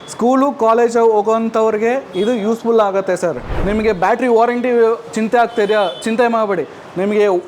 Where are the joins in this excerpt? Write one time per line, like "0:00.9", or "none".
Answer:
0:03.4